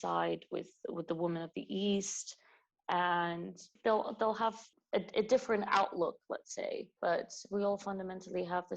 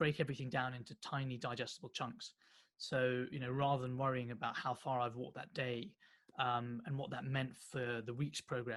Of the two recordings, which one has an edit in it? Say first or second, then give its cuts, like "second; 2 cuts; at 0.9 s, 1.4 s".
first; 3 cuts; at 3.7 s, 4.7 s, 6.9 s